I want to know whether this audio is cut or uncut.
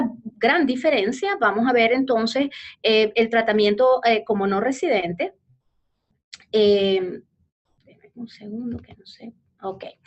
uncut